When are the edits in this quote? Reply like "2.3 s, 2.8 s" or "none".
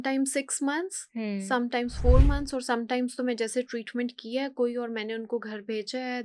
none